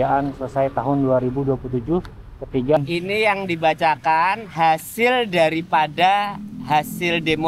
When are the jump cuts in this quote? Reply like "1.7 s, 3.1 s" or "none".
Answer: 2.8 s